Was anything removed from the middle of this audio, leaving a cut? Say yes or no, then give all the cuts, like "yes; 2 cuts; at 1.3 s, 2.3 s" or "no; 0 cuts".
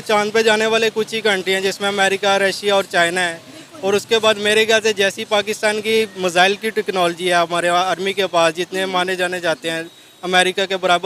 no; 0 cuts